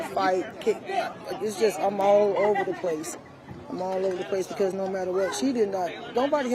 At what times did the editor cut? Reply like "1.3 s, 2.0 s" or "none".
none